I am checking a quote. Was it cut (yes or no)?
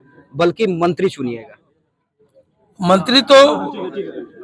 no